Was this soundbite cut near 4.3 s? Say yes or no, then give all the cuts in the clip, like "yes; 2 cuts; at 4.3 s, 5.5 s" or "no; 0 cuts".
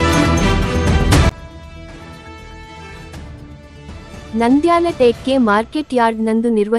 no; 1 cut; at 2.9 s